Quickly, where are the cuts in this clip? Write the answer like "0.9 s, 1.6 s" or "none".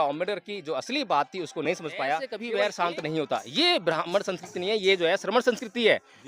2.3 s